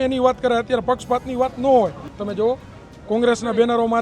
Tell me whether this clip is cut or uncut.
cut